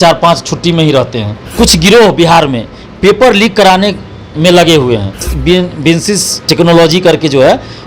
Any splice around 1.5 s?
yes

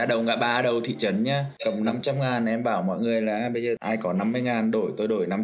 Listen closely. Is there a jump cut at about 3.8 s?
yes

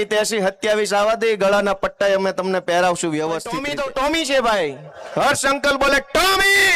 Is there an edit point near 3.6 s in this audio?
yes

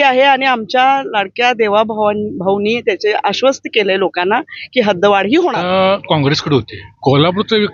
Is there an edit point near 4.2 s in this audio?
no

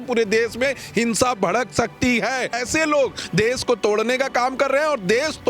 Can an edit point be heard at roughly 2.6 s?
yes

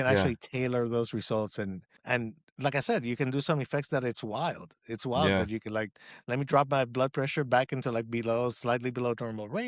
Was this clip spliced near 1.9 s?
yes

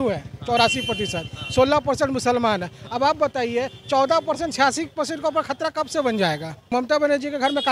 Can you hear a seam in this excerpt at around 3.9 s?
no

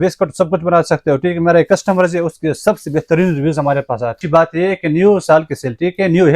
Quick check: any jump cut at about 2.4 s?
no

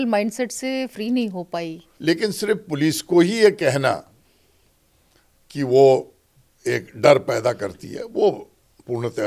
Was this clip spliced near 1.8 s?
yes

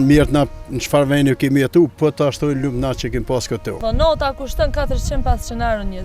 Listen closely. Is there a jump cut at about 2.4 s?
no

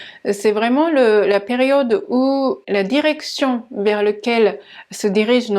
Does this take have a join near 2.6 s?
yes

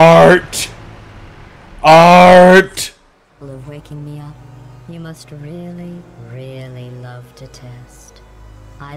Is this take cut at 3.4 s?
yes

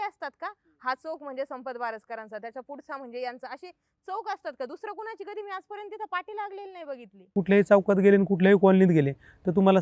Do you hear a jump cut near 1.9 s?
no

